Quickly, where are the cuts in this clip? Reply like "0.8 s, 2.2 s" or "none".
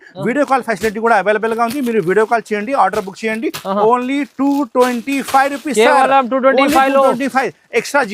none